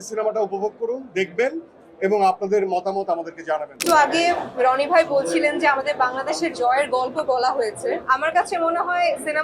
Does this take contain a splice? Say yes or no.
yes